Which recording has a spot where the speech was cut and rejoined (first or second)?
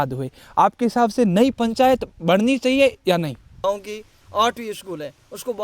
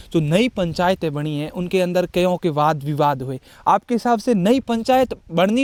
first